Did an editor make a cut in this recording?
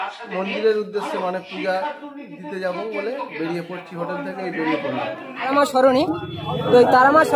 yes; 1 cut; at 5.5 s

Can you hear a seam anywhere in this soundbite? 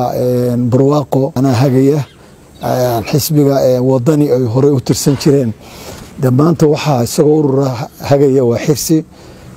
yes; 1 cut; at 1.1 s

